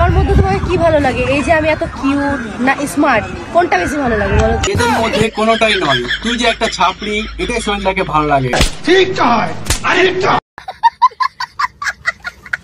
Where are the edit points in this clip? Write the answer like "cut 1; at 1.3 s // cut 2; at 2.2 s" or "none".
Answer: cut 1; at 8.6 s